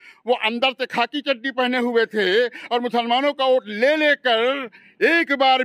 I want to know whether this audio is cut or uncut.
uncut